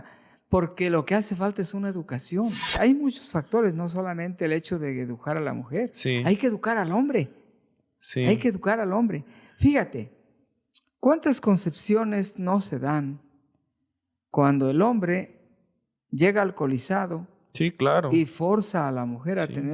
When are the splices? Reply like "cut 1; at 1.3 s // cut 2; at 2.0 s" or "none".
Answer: cut 1; at 2.7 s